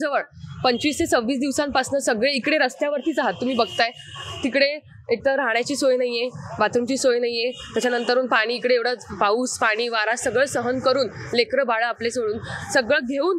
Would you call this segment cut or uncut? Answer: uncut